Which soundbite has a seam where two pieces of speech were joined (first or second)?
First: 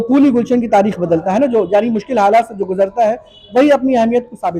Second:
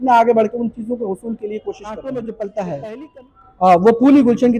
second